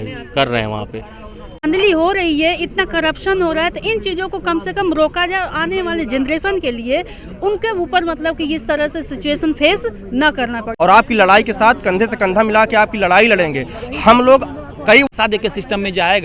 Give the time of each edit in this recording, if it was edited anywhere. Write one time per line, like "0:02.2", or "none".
0:01.6
0:10.6
0:15.1